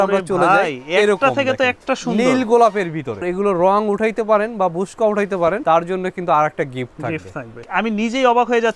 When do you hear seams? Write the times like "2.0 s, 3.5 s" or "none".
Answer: 3.2 s, 5.6 s, 7.6 s